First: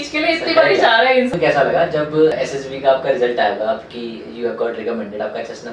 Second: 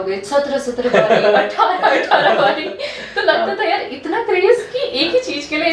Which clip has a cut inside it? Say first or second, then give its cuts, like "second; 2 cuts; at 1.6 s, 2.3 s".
first; 2 cuts; at 1.3 s, 2.3 s